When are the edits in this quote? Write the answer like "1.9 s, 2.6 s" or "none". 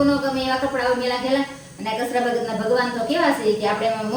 none